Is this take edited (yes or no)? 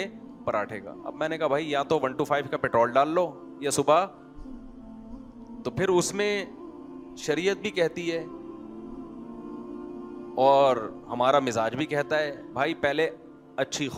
no